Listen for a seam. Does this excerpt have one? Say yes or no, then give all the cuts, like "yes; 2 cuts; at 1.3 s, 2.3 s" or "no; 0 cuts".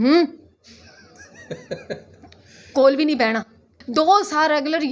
yes; 1 cut; at 3.7 s